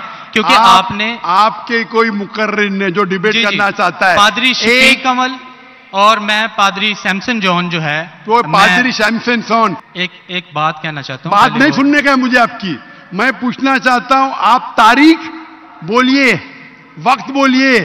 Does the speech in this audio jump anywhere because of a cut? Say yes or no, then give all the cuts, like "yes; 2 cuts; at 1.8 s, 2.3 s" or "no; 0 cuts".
yes; 1 cut; at 9.9 s